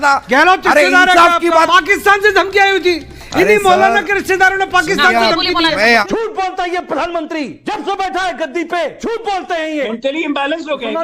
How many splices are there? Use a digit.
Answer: 4